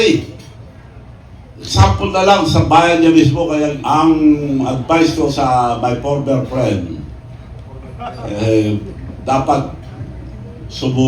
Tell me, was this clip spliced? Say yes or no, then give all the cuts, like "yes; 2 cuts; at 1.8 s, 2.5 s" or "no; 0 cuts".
yes; 1 cut; at 3.8 s